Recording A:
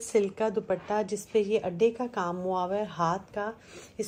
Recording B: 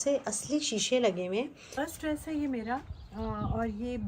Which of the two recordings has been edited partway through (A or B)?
B